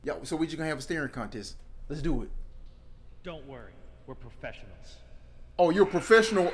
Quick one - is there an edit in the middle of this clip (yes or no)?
no